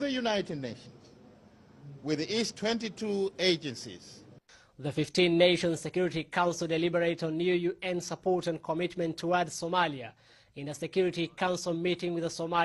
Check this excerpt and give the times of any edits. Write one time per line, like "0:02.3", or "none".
0:08.6